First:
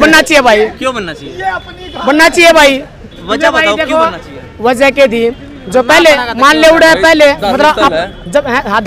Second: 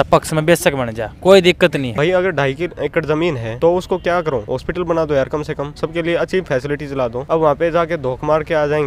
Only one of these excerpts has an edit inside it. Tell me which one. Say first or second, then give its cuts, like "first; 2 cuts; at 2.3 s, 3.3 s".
second; 5 cuts; at 1.9 s, 3.5 s, 4.5 s, 5.7 s, 7.2 s